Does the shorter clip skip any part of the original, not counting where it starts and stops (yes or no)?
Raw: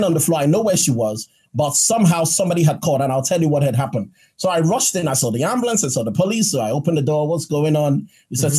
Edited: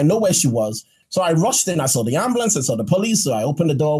yes